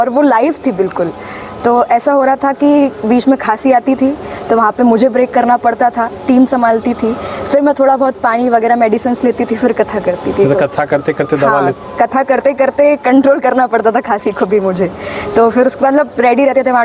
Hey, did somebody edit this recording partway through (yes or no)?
no